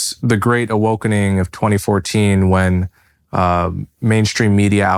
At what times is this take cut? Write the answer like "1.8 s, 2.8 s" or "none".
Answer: none